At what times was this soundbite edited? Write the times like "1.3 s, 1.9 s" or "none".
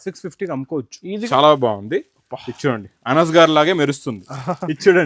1.3 s